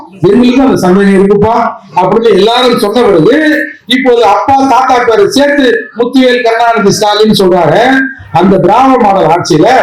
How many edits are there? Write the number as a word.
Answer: zero